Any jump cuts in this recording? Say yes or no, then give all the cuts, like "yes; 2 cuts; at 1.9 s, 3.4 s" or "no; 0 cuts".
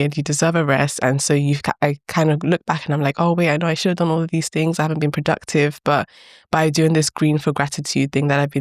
no; 0 cuts